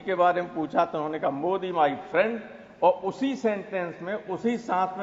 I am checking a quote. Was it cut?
no; 0 cuts

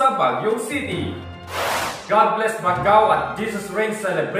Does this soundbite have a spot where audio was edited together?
yes; 1 cut; at 1.7 s

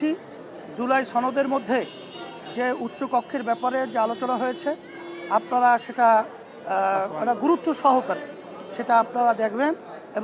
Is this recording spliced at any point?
no; 0 cuts

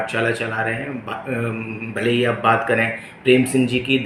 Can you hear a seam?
no; 0 cuts

